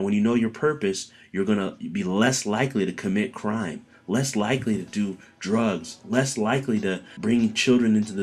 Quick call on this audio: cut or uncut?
cut